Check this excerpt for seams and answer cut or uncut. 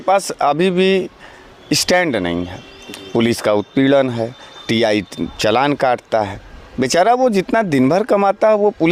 uncut